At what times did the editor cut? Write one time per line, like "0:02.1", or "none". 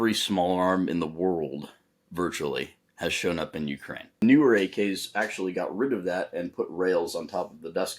0:04.2